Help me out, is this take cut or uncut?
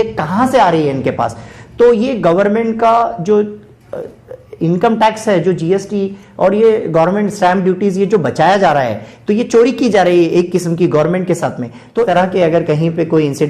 cut